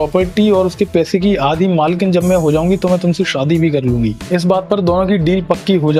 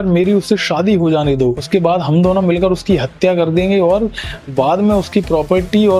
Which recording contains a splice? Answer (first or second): second